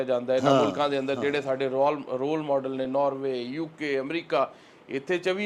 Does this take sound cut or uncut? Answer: uncut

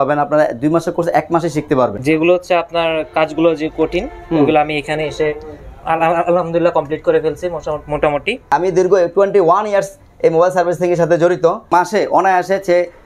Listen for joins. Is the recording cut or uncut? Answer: cut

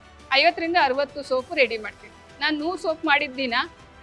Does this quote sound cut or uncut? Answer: cut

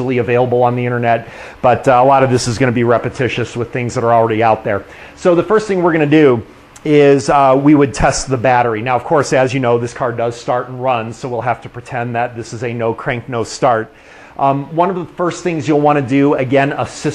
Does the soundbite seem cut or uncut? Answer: cut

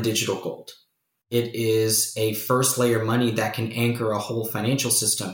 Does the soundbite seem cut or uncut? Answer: cut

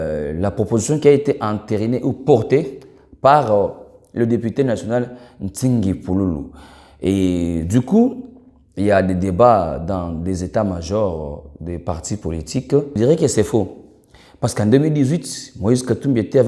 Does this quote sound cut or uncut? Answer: cut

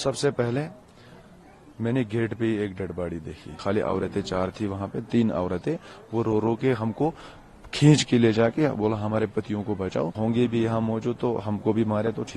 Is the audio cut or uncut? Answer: cut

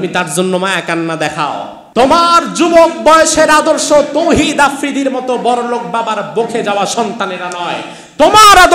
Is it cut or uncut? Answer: cut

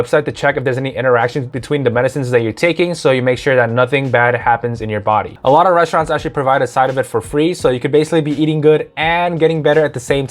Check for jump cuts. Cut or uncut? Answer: cut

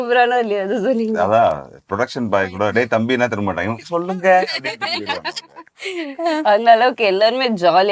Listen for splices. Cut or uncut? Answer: uncut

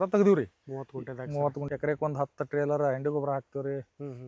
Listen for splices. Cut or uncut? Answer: cut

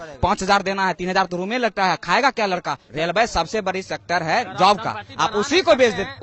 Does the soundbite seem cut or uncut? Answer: cut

